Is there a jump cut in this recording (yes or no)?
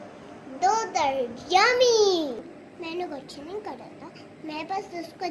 yes